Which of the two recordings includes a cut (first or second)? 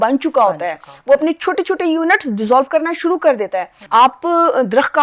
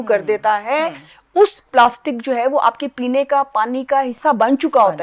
first